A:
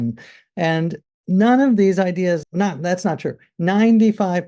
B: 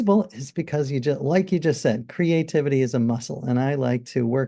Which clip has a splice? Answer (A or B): A